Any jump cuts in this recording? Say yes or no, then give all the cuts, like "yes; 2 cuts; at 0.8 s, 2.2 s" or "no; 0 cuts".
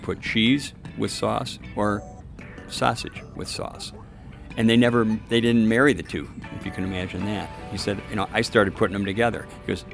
yes; 1 cut; at 6.4 s